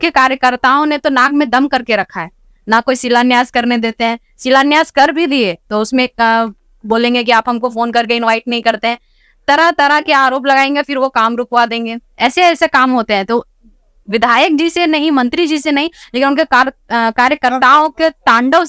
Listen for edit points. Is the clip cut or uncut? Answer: uncut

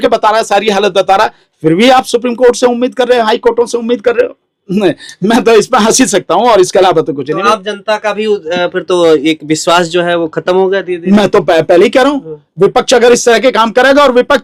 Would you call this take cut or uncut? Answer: uncut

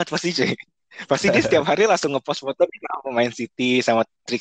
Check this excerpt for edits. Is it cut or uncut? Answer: uncut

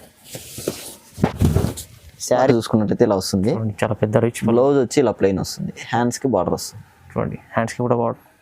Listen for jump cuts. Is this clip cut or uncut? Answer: cut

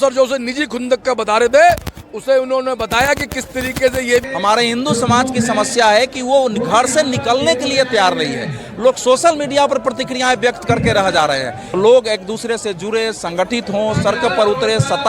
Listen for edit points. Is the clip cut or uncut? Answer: cut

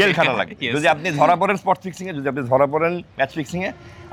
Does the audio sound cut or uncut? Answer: uncut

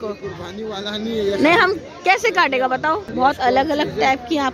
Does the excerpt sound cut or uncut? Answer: cut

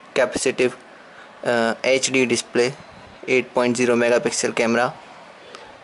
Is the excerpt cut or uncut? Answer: cut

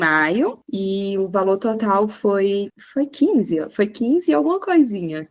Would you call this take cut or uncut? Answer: uncut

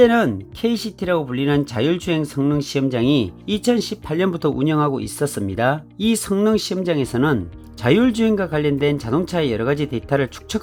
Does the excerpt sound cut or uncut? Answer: uncut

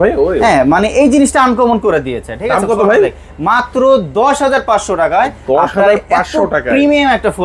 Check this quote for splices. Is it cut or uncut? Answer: uncut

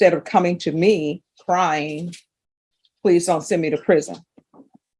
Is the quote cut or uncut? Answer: uncut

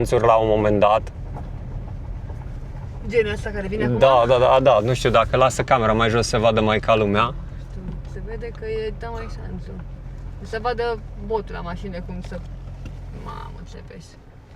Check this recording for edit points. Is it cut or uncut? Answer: uncut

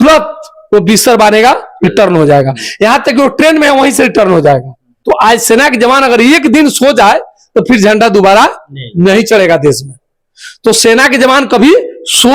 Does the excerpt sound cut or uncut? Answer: cut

